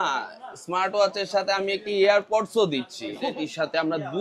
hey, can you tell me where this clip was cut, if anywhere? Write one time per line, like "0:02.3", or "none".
0:03.2